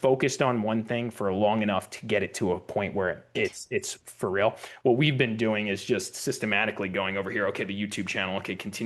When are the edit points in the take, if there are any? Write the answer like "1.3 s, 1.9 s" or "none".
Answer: 3.4 s